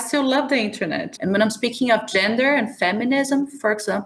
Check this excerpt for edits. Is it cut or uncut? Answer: cut